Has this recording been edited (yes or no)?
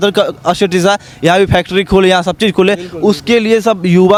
no